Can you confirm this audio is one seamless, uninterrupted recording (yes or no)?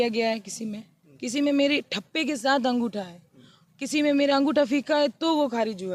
yes